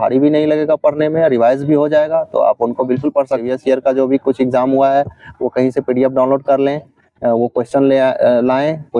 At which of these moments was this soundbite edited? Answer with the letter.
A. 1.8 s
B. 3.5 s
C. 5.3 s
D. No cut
B